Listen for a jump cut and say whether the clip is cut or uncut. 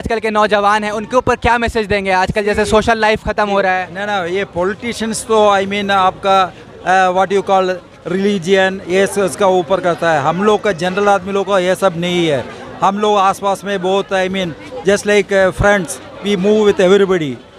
uncut